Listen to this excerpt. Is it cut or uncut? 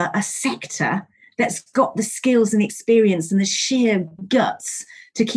uncut